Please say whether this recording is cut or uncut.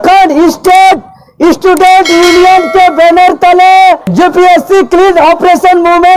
uncut